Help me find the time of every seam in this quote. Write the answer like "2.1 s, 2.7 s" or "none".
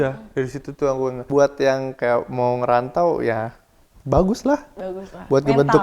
1.2 s

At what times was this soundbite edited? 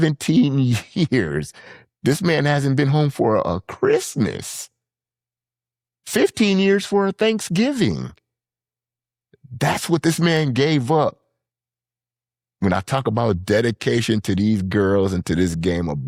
none

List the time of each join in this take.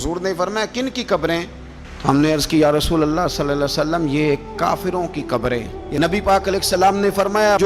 5.8 s

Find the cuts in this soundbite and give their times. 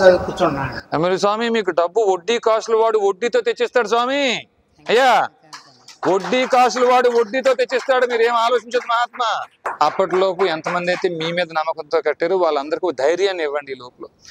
9.7 s

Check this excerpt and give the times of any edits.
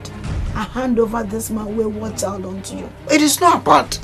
2.9 s

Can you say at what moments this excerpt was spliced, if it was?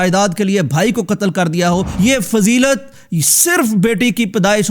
1.9 s

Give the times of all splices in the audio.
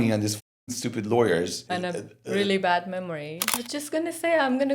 1.6 s, 3.4 s

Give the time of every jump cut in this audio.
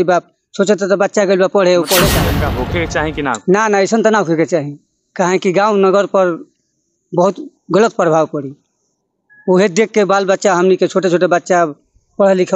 2.3 s

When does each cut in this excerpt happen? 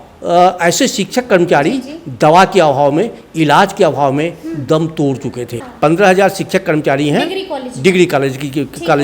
5.6 s

